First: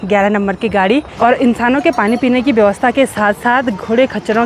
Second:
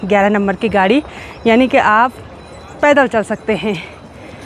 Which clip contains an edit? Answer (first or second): first